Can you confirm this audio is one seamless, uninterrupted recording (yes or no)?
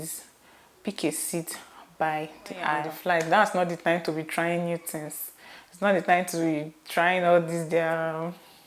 no